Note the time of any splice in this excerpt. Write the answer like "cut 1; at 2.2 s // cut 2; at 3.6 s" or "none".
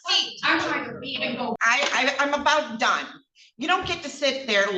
cut 1; at 1.6 s